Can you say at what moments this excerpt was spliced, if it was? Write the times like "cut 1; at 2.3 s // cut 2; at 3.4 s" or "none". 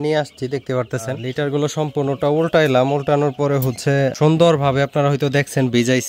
cut 1; at 1.4 s // cut 2; at 4.1 s